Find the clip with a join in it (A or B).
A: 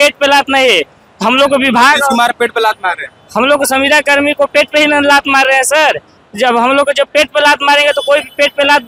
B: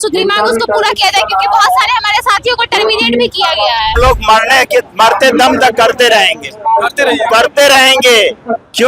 B